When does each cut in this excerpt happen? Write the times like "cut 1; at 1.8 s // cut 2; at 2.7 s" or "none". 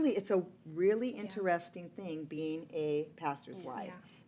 none